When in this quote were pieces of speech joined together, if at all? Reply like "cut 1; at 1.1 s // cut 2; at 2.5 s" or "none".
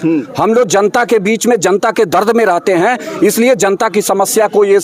none